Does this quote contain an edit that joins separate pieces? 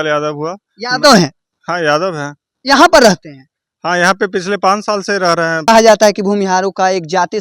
yes; 1 cut; at 5.7 s

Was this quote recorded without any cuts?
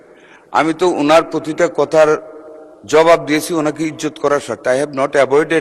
yes; 0 cuts

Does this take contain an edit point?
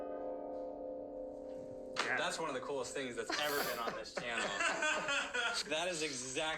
yes; 1 cut; at 5.6 s

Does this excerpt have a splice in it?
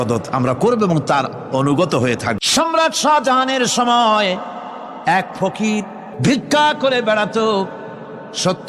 yes; 2 cuts; at 2.4 s, 6.0 s

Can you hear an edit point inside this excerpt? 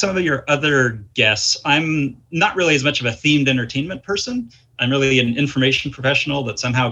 no; 0 cuts

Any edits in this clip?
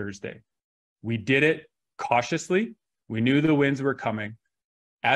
yes; 1 cut; at 2.9 s

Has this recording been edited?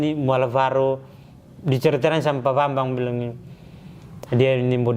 no; 0 cuts

